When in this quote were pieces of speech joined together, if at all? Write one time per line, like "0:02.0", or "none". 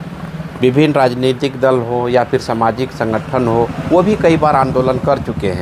none